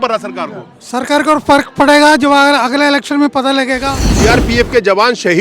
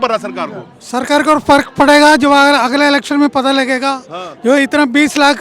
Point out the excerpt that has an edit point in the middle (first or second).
first